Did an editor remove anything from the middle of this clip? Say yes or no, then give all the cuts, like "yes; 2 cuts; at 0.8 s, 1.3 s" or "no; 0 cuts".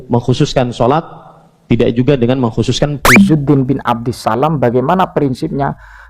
yes; 1 cut; at 3.0 s